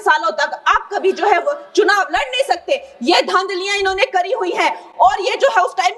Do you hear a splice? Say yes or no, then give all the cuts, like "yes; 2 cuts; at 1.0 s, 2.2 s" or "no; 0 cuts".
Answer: no; 0 cuts